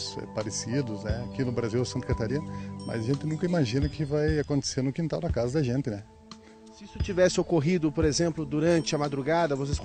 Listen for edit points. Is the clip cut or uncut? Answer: uncut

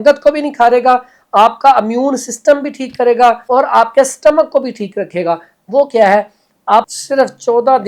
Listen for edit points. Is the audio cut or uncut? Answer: cut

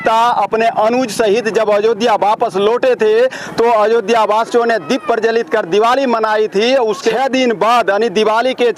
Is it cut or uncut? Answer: cut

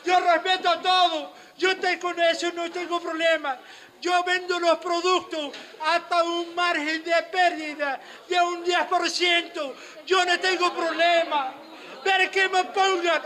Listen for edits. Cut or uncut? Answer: uncut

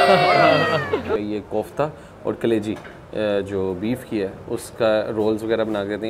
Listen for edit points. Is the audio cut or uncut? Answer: cut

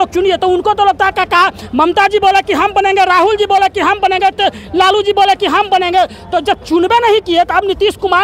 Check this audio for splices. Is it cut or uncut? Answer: uncut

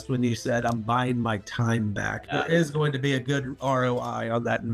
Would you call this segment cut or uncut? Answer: cut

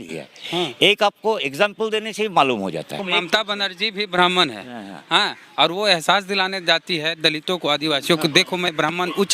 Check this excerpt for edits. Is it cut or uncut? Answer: cut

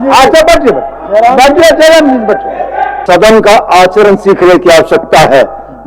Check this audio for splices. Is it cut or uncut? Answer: cut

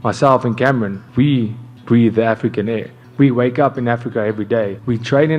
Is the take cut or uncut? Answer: cut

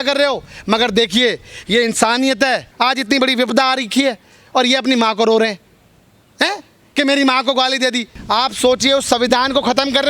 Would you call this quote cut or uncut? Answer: cut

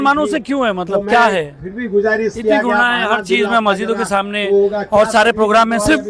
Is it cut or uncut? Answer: uncut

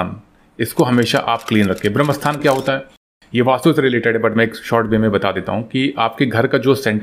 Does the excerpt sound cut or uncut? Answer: uncut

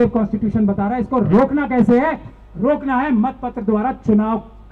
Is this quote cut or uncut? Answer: uncut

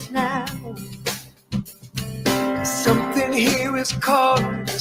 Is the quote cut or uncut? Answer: uncut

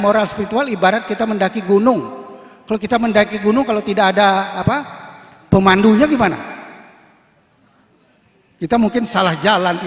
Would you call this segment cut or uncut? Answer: uncut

